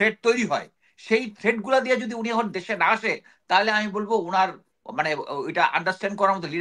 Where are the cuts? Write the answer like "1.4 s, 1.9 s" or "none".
none